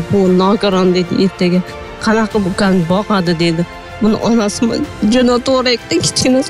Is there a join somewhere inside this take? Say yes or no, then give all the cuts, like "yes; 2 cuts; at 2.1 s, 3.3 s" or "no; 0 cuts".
no; 0 cuts